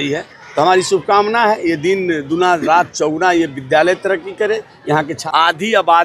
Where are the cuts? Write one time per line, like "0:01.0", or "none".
0:05.1